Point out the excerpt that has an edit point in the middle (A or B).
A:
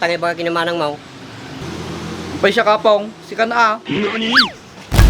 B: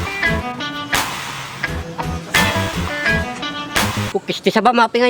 B